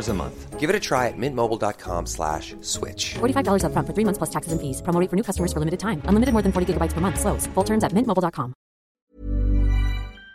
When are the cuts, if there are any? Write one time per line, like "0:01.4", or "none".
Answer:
0:09.0